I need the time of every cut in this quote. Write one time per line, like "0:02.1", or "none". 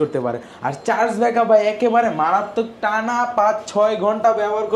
none

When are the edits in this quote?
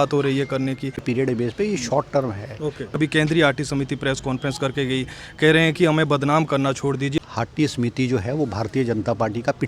0:01.0
0:03.0
0:07.2

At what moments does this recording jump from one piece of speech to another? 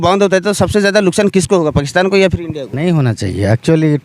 0:02.7

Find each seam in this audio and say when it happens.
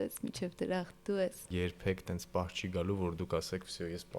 0:01.4

